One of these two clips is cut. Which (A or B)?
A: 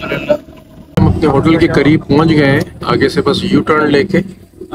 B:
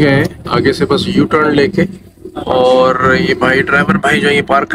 A